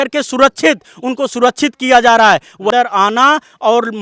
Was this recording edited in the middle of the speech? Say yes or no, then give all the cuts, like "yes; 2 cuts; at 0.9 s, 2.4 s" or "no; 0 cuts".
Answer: yes; 1 cut; at 2.7 s